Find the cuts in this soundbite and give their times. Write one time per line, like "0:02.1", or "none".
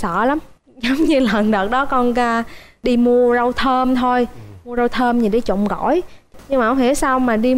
0:02.7
0:06.4